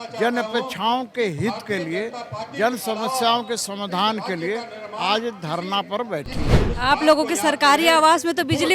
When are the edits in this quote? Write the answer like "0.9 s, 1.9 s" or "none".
6.4 s